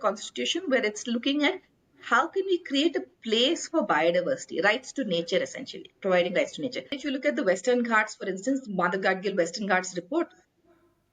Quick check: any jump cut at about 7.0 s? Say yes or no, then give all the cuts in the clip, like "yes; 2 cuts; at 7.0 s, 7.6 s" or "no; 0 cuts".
yes; 1 cut; at 7.0 s